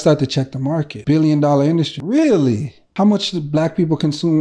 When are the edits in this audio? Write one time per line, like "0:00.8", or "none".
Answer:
0:00.9
0:02.0
0:02.8

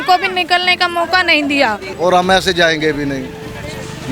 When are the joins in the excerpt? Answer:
0:01.9

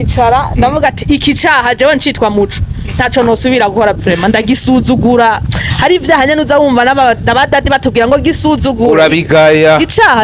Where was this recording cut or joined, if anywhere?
none

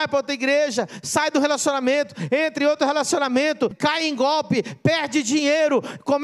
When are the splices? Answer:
0:03.7

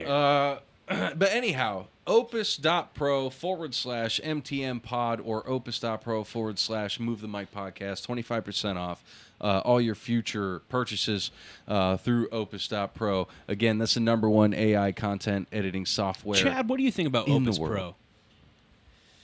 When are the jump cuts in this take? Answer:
none

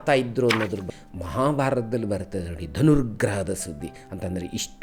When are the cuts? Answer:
0:00.9

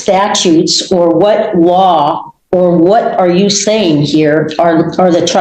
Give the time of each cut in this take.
none

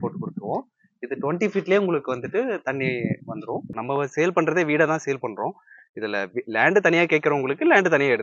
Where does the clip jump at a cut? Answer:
0:03.7

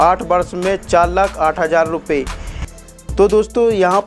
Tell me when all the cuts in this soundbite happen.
0:02.6

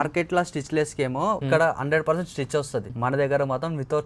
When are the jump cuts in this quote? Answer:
0:01.4
0:02.9

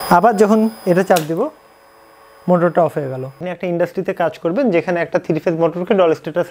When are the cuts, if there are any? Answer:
0:03.3

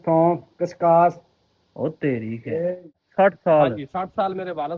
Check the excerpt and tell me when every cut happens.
0:02.9

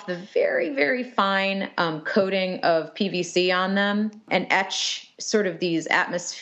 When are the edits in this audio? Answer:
0:04.2

